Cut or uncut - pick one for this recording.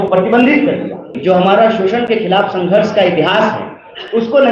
cut